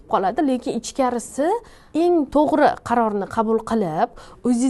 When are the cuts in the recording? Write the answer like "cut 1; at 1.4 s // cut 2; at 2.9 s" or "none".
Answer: cut 1; at 1.8 s